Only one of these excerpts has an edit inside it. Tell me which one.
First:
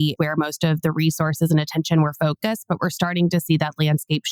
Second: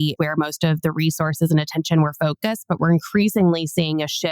second; 1 cut; at 2.8 s

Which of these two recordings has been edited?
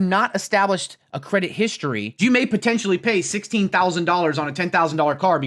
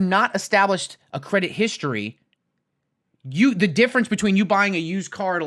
first; 1 cut; at 2.2 s

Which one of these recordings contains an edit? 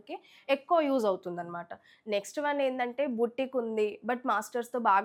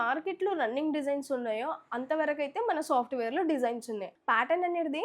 second; 1 cut; at 4.1 s

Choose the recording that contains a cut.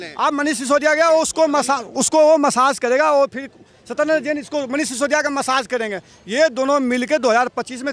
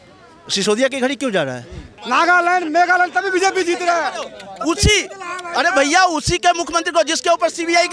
second; 1 cut; at 1.9 s

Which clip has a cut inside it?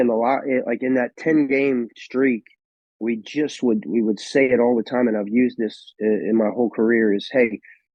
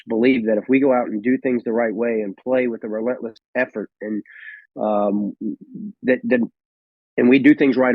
second; 1 cut; at 3.4 s

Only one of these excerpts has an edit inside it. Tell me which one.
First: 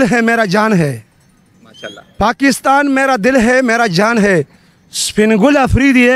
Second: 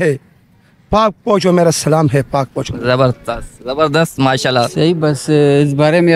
second; 1 cut; at 4.7 s

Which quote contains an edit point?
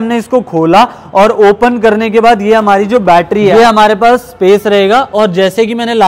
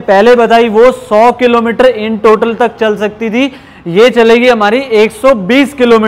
first; 1 cut; at 3.5 s

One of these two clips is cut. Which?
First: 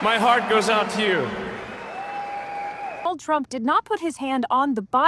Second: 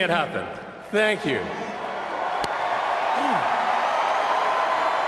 first; 1 cut; at 3.0 s

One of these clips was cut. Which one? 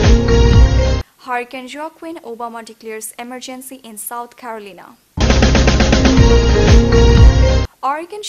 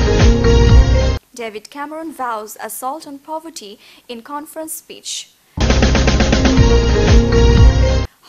second; 1 cut; at 1.0 s

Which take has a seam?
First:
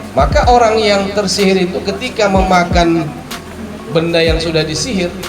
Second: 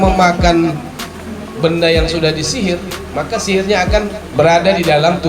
second; 1 cut; at 4.2 s

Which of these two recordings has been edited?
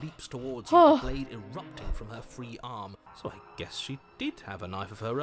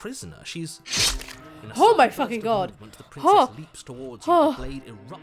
first; 1 cut; at 3.1 s

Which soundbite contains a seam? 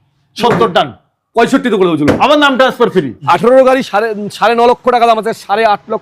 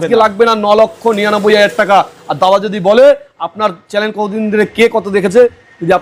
first; 1 cut; at 3.1 s

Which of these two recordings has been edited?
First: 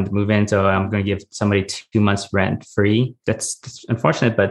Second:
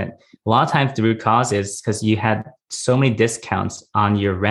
first; 1 cut; at 3.2 s

